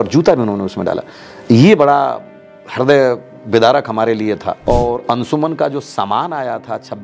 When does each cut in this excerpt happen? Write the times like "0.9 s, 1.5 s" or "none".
4.5 s